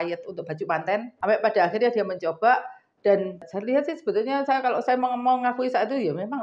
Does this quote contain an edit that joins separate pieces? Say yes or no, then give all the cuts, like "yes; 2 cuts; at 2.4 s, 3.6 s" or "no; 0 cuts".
yes; 2 cuts; at 1.1 s, 3.5 s